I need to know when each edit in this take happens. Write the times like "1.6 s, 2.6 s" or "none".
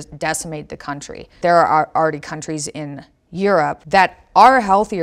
1.3 s, 3.8 s